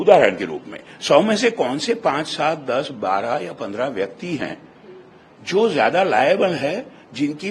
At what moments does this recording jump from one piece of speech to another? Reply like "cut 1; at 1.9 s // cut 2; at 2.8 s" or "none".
none